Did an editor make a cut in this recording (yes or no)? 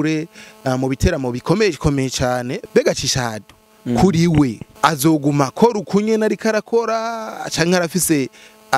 yes